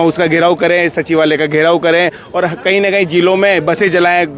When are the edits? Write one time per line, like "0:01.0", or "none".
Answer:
none